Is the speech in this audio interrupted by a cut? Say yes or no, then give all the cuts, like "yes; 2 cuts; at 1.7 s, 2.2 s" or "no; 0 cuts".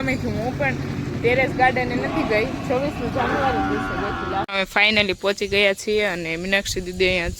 yes; 1 cut; at 4.5 s